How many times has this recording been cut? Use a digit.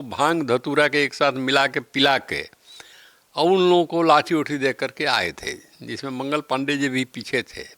0